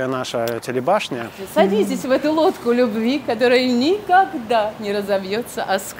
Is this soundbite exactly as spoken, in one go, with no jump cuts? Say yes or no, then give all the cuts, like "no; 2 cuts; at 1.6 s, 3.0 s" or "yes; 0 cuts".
no; 1 cut; at 1.4 s